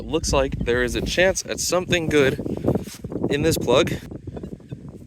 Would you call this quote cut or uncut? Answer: cut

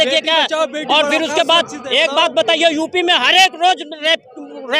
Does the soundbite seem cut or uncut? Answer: uncut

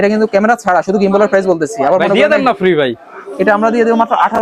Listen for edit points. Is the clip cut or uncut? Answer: uncut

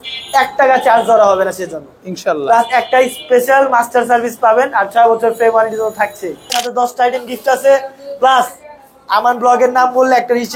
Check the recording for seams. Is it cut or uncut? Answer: cut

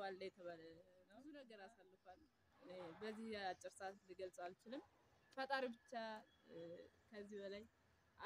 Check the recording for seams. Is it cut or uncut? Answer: cut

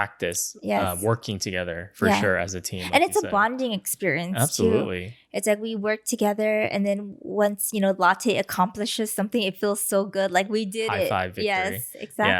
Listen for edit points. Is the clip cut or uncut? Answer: uncut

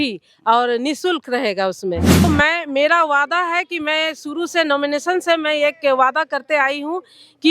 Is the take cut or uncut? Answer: cut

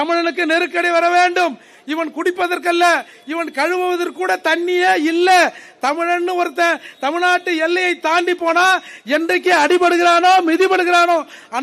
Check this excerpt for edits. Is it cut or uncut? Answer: uncut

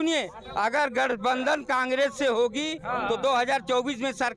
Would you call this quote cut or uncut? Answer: uncut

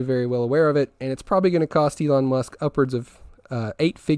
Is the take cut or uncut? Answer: uncut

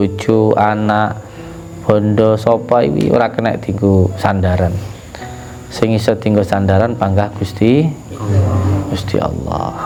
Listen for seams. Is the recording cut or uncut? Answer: uncut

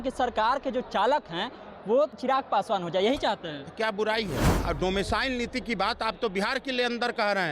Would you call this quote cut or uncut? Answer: cut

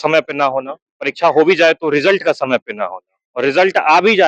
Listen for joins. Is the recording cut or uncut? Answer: uncut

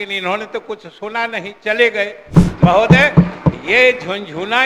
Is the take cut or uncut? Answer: cut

